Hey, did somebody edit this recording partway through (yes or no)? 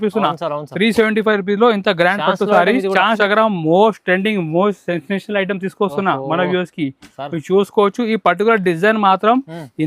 yes